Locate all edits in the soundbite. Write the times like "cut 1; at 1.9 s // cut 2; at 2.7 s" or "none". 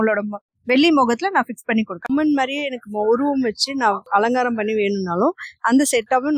cut 1; at 1.9 s